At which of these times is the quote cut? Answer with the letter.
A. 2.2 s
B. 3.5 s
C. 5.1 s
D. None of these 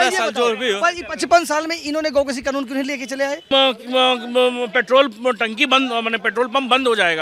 B